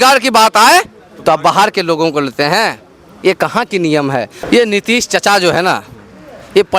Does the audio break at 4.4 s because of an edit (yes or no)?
yes